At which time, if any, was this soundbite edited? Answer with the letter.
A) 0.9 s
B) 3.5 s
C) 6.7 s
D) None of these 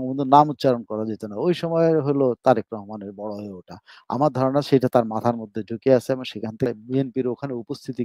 C